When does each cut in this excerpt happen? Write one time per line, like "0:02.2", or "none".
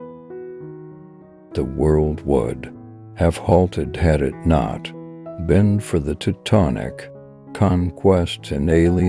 none